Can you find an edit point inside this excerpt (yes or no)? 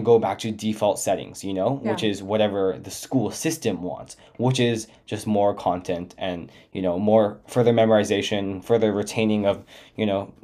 no